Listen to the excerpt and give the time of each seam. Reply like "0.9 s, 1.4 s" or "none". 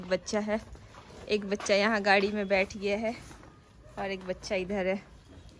none